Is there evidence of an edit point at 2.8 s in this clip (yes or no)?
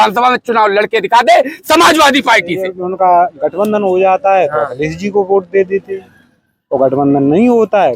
yes